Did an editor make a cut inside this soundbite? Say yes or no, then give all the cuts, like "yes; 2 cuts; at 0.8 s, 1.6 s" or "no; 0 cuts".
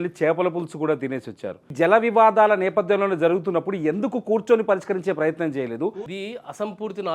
yes; 2 cuts; at 1.6 s, 6.0 s